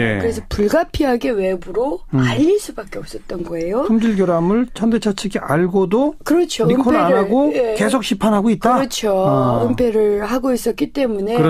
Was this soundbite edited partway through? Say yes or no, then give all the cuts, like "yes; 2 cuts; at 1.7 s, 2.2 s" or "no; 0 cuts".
yes; 1 cut; at 7.0 s